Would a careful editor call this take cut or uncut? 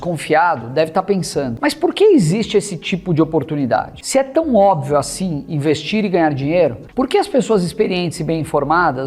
cut